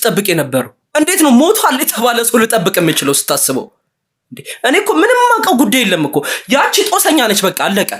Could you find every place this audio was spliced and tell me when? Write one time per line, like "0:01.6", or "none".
none